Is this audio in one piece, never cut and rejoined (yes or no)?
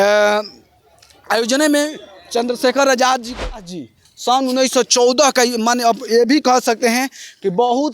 no